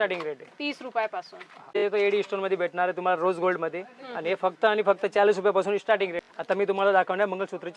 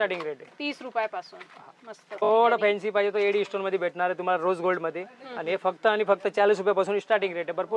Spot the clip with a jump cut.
first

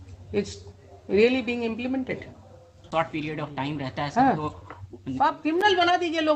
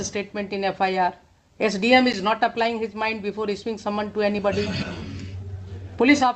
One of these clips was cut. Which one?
first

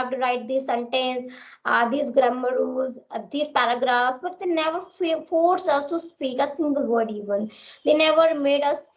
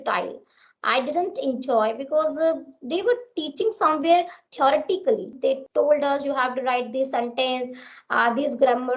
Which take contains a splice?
second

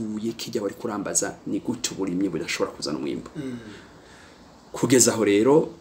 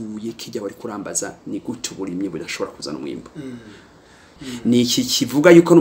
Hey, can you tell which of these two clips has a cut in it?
second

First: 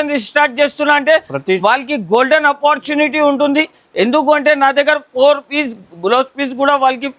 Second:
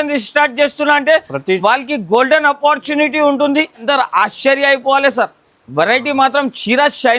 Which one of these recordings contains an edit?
second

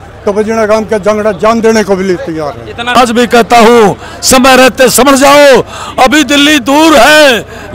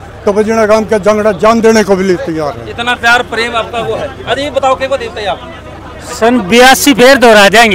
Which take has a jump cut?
first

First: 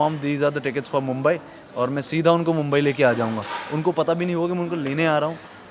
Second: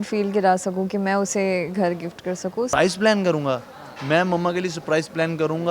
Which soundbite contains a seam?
second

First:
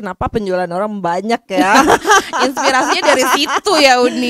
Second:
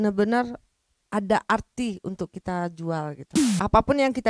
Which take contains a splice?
second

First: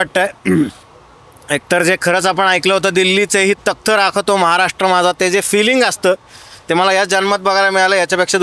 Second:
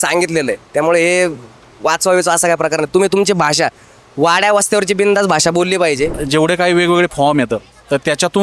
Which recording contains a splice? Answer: second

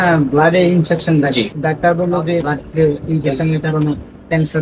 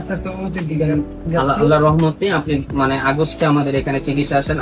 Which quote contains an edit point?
first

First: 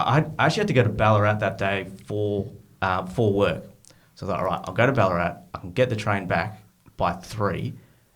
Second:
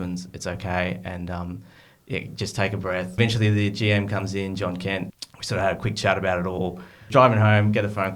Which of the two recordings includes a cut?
second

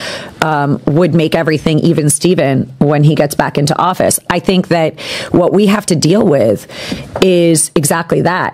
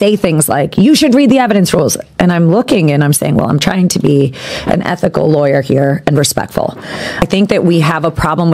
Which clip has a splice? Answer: second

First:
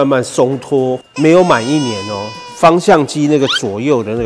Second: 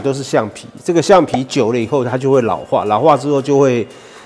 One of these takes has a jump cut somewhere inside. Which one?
first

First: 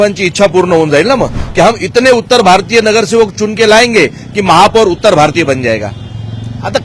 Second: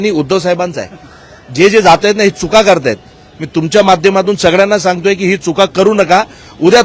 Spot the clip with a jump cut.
first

